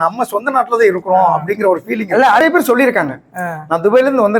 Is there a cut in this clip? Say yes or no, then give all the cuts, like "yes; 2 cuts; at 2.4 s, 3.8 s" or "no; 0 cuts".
yes; 1 cut; at 2.4 s